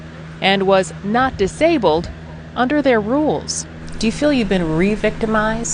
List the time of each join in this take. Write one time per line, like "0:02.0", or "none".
0:01.6